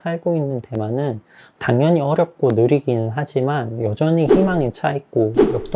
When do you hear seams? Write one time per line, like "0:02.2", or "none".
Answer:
none